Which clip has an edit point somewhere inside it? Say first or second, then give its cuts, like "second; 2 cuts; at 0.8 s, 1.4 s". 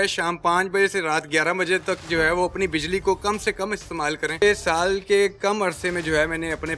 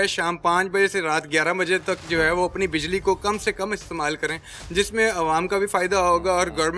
first; 1 cut; at 4.4 s